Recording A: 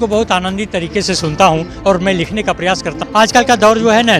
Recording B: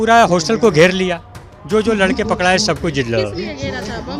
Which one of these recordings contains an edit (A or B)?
A